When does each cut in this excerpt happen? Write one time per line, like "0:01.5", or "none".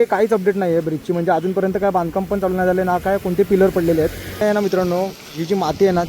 0:04.4